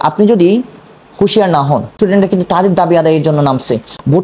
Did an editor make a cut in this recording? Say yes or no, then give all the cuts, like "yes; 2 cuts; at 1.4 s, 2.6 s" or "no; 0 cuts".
yes; 1 cut; at 1.9 s